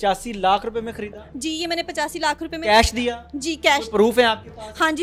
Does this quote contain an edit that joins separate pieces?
no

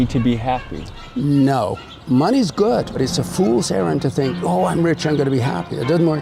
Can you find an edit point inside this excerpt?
yes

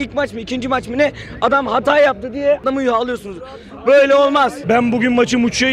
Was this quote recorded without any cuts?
no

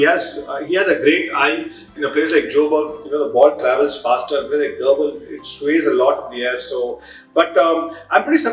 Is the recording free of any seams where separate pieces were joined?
no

